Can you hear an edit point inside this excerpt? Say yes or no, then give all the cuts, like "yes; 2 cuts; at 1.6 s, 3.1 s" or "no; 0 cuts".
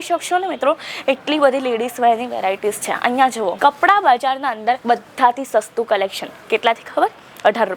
no; 0 cuts